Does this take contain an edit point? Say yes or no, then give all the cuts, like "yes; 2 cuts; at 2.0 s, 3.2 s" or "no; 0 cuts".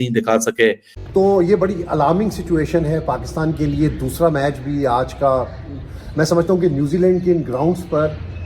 yes; 1 cut; at 0.9 s